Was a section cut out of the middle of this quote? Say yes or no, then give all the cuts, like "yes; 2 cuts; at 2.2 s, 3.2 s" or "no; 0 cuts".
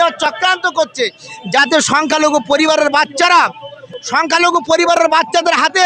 no; 0 cuts